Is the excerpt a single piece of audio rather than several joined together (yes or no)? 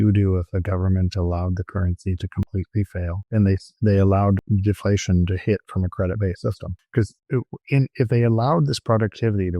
no